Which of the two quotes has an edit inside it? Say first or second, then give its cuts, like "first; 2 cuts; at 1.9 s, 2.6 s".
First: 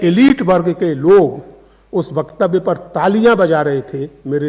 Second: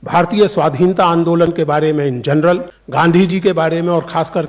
second; 1 cut; at 2.8 s